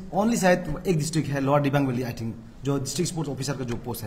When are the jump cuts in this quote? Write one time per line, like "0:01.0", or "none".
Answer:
none